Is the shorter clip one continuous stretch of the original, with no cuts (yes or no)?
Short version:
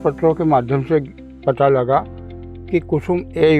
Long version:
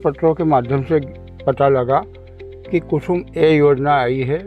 yes